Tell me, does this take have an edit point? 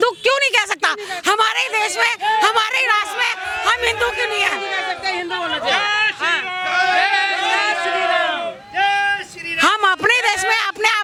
no; 0 cuts

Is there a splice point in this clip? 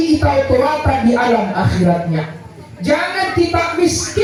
no; 0 cuts

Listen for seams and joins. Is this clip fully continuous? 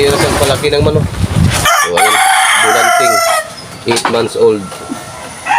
no; 1 cut; at 1.6 s

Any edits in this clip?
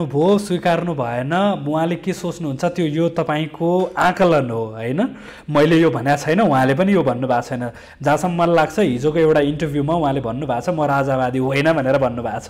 no; 0 cuts

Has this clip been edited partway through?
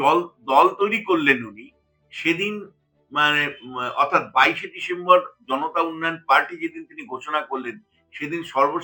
no; 0 cuts

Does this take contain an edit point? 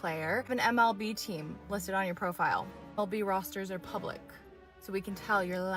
no; 0 cuts

